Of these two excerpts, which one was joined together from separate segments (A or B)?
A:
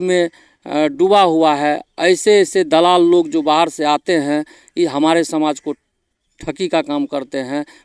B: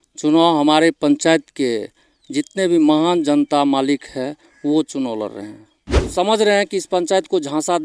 B